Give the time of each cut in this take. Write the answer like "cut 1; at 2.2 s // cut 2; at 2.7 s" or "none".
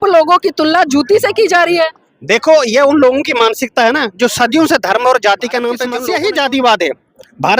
cut 1; at 5.9 s

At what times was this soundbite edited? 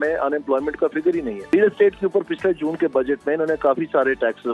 cut 1; at 1.5 s

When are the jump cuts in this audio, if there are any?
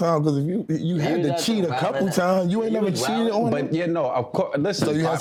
none

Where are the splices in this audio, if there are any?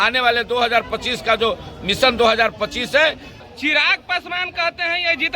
cut 1; at 3.3 s

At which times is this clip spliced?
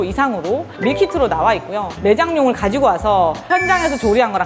cut 1; at 1.9 s

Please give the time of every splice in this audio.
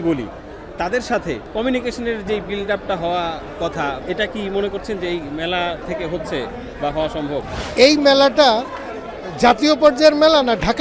cut 1; at 1.4 s // cut 2; at 4.0 s // cut 3; at 5.8 s // cut 4; at 7.6 s

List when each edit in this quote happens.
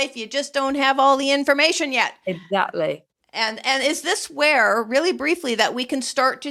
none

